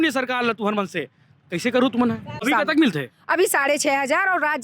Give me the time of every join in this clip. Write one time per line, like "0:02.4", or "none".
0:02.4